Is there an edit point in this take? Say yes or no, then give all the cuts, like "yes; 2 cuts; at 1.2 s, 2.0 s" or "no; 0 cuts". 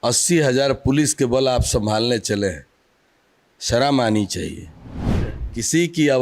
yes; 1 cut; at 5.2 s